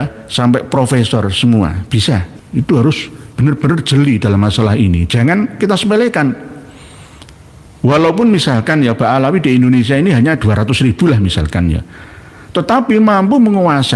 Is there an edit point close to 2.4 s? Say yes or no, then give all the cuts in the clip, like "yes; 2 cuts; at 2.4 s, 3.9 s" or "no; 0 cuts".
yes; 1 cut; at 2.4 s